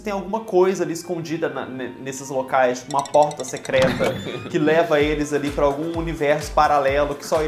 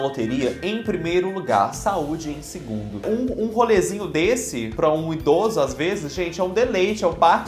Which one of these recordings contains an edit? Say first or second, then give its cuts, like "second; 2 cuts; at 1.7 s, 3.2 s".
second; 1 cut; at 3.0 s